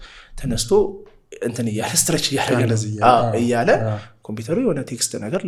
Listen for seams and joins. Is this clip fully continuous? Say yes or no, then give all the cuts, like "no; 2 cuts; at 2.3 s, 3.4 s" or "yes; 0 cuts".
yes; 0 cuts